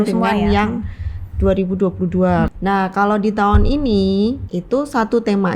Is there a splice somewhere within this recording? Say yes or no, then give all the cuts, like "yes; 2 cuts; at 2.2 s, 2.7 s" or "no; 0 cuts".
yes; 2 cuts; at 2.5 s, 4.5 s